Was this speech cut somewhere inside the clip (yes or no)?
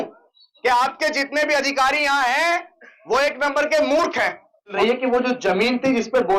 yes